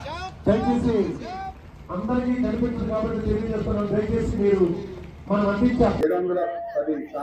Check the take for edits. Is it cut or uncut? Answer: cut